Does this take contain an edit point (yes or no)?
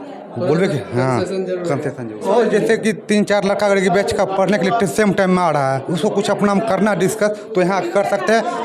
yes